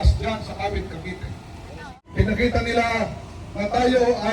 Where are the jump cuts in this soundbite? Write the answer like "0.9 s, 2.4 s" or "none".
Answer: 2.0 s